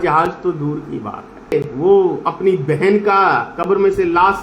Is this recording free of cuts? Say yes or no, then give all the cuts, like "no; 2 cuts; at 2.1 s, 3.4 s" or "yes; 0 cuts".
no; 1 cut; at 1.5 s